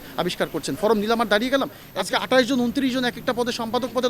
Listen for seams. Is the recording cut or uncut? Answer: cut